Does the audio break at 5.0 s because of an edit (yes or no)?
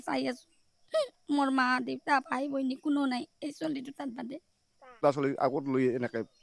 yes